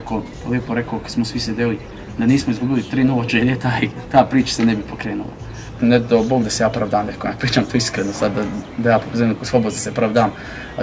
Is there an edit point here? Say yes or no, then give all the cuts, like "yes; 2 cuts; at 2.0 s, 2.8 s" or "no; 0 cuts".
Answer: yes; 1 cut; at 5.7 s